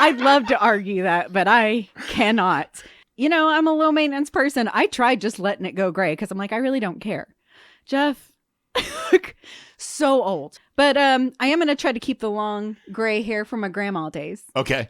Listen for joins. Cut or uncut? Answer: cut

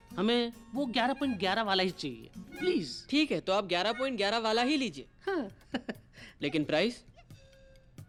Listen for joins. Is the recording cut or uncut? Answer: uncut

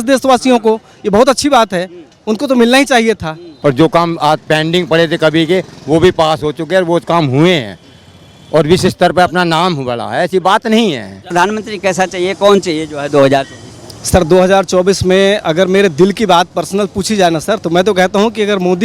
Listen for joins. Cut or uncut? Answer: cut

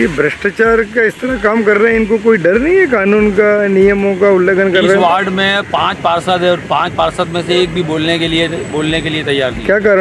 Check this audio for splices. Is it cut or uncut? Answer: uncut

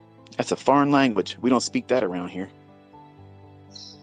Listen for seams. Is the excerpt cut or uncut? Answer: uncut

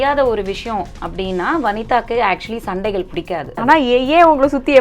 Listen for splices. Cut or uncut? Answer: cut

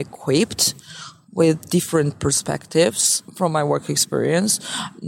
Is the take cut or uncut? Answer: uncut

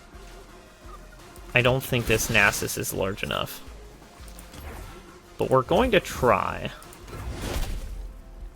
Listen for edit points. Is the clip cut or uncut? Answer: cut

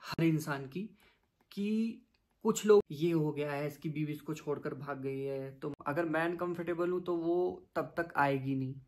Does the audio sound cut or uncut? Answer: cut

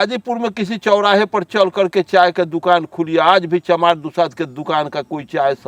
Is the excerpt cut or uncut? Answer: uncut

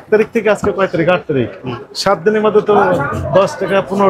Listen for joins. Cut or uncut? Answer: uncut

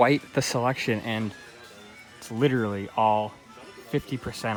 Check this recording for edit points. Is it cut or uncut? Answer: uncut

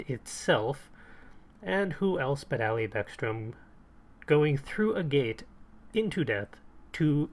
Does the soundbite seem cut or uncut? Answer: cut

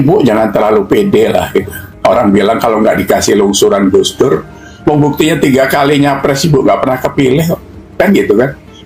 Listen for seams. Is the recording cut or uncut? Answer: uncut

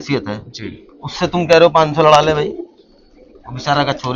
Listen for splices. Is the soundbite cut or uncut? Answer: uncut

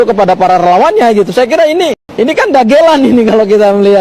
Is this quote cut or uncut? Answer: cut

